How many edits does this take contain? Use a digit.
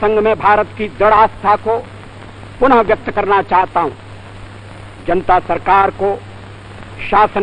1